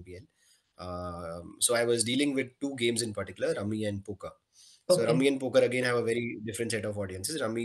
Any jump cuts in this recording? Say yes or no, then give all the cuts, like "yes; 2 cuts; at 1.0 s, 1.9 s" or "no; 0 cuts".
no; 0 cuts